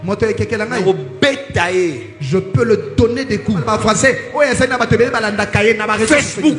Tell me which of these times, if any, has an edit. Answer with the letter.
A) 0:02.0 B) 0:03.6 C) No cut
B